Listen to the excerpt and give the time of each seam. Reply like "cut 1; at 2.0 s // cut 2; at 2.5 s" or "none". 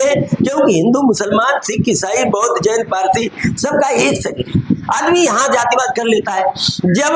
none